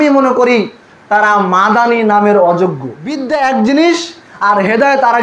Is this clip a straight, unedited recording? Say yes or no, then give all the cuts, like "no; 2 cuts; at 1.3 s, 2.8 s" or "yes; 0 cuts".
no; 1 cut; at 3.2 s